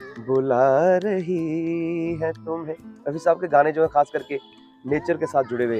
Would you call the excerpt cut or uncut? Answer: uncut